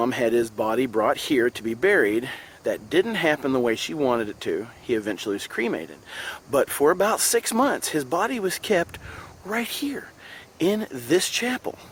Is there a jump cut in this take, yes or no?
no